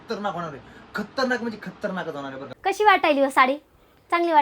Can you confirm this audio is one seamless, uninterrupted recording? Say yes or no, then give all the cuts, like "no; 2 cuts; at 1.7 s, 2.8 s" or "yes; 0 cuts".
no; 1 cut; at 2.5 s